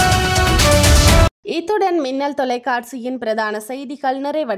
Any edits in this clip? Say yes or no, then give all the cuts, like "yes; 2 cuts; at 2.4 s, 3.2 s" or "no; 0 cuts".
no; 0 cuts